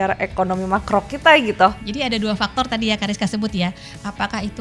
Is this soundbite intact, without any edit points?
no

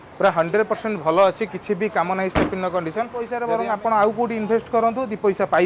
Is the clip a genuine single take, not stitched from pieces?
no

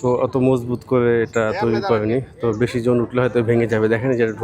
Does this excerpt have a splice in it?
no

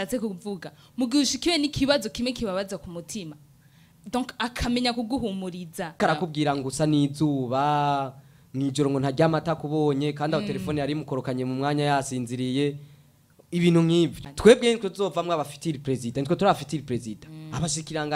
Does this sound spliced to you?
yes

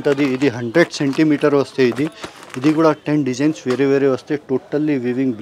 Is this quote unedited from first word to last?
yes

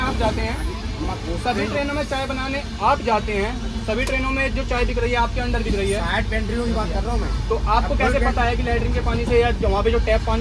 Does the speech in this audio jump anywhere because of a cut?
no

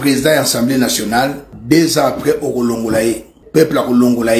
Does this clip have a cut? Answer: yes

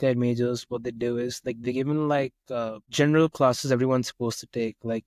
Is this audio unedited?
no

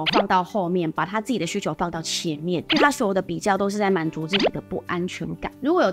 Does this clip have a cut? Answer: no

